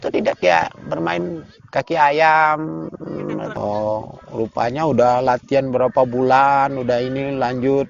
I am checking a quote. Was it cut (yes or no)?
yes